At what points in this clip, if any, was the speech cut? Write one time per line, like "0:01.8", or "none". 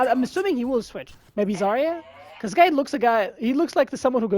0:01.1